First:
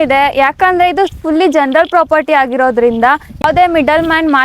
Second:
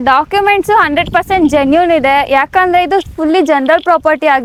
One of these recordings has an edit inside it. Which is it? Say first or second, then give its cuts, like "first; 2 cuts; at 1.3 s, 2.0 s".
first; 1 cut; at 3.4 s